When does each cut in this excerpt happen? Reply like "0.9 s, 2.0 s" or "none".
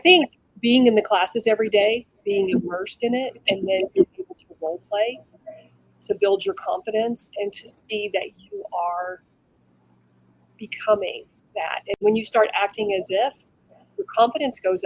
11.9 s